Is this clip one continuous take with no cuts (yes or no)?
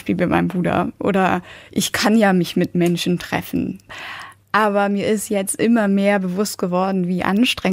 no